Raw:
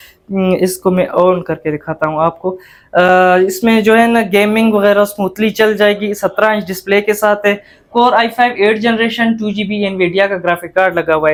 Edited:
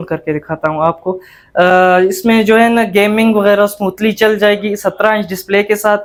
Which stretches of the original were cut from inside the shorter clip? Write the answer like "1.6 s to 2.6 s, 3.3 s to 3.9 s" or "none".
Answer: none